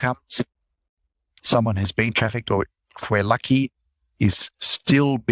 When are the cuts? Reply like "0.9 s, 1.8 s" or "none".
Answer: 1.3 s